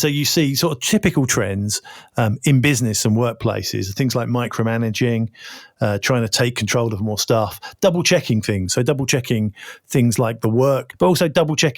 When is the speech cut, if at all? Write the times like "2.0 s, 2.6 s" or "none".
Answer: 10.9 s